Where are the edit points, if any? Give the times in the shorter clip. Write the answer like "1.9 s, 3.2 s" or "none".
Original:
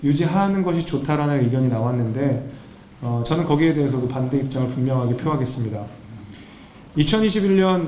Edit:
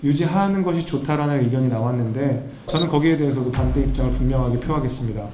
2.6 s